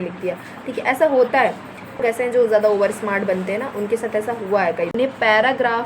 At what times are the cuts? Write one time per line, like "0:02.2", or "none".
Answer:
0:02.0
0:04.9